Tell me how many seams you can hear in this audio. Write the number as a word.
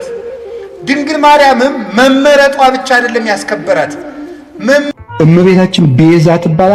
one